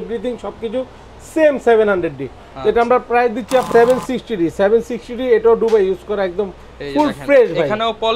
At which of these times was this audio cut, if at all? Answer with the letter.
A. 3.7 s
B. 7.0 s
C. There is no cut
A